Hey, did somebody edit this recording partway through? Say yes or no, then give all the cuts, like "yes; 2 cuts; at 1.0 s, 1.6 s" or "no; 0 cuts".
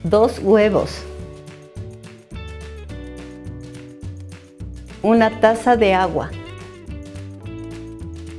no; 0 cuts